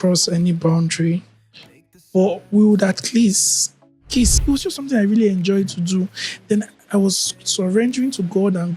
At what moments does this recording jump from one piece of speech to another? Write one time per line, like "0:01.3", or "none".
0:04.4